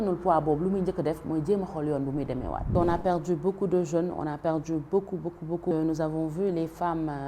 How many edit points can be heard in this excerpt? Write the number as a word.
two